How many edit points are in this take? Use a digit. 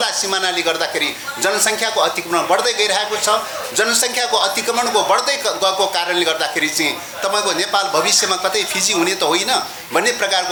0